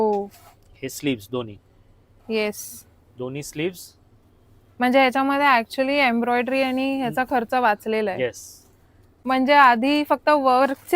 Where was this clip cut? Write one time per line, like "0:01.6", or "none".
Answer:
0:09.1